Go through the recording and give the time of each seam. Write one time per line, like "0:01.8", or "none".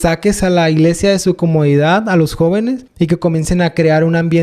0:02.9